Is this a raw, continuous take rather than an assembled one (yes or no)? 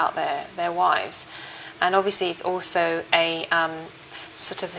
no